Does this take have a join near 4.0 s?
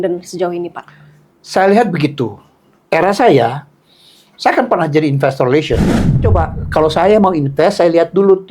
no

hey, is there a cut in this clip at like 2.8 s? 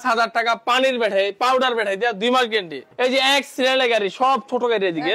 yes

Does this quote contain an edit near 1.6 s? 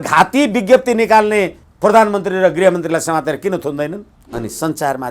yes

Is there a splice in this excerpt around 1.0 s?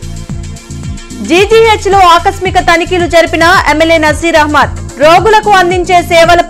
yes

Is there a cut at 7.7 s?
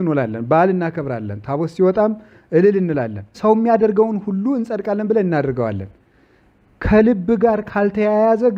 no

